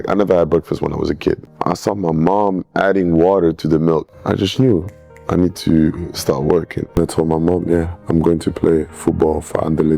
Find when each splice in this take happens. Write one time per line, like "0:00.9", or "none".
0:01.5
0:04.1
0:07.0